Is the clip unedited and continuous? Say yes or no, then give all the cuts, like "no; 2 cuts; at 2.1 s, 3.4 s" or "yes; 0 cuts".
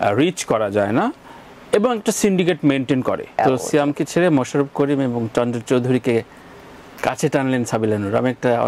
no; 1 cut; at 3.4 s